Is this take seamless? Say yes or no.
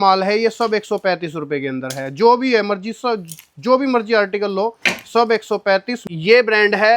no